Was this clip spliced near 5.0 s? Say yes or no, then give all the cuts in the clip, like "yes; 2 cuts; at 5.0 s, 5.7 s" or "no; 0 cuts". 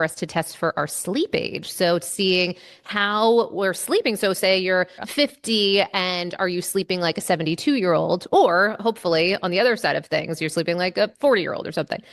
yes; 1 cut; at 5.0 s